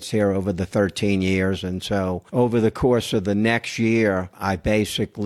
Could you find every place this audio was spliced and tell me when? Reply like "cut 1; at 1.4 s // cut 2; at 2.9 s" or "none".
cut 1; at 2.2 s // cut 2; at 4.4 s